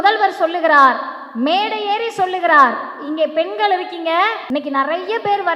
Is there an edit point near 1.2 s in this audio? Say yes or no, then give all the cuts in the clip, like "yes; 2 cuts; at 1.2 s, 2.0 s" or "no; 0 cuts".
no; 1 cut; at 4.4 s